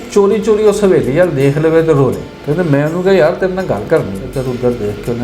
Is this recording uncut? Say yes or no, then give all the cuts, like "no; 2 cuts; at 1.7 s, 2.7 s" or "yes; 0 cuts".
no; 2 cuts; at 2.3 s, 4.3 s